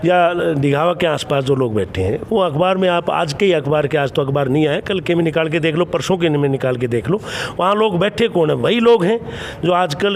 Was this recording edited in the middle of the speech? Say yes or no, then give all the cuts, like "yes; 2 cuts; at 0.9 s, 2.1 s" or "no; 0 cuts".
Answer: no; 0 cuts